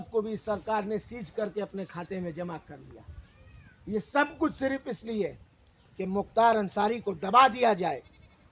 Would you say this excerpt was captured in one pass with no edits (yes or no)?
yes